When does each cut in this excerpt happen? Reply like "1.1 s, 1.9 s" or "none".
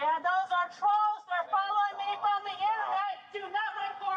none